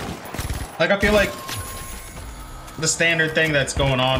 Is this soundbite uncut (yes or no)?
yes